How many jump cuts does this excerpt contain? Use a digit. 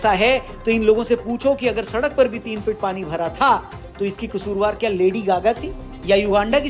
0